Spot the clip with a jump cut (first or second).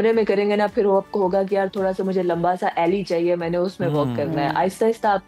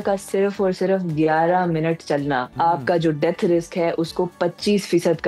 second